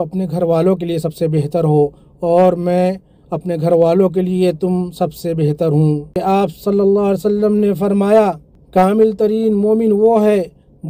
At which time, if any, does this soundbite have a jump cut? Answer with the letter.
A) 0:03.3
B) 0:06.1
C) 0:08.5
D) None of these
B